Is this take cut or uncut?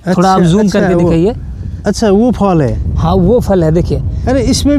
uncut